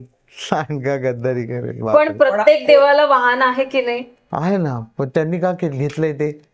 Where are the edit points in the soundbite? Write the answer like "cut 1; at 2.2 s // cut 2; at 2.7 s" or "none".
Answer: none